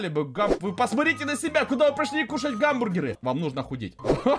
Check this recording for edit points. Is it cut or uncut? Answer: cut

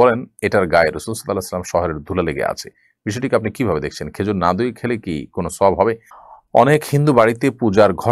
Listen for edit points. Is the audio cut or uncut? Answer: cut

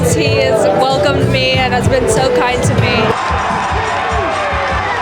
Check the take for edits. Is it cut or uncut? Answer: cut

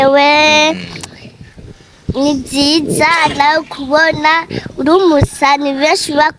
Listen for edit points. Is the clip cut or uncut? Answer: uncut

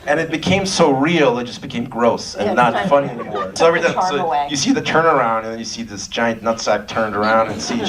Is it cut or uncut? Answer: cut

